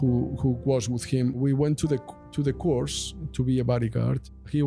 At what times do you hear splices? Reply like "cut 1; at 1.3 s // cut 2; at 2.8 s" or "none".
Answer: none